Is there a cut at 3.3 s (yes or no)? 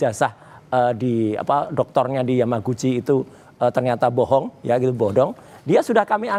no